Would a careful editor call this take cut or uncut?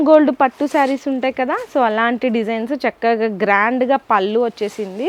uncut